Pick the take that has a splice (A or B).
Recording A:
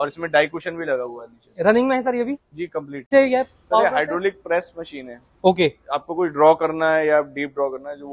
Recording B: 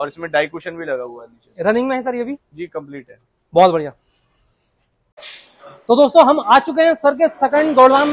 A